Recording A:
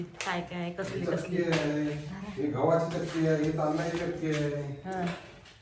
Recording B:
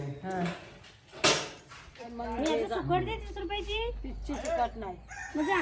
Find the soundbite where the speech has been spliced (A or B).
B